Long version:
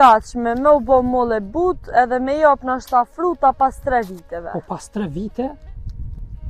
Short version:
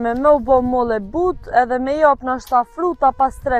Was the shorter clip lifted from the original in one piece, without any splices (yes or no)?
yes